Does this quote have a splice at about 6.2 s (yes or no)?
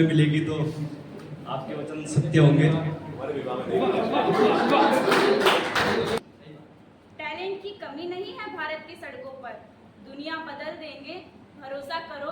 yes